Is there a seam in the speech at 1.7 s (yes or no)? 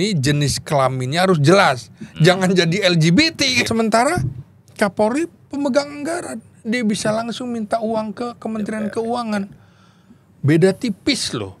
no